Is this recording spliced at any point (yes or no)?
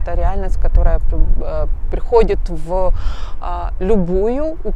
no